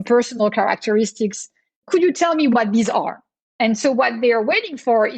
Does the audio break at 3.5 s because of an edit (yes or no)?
no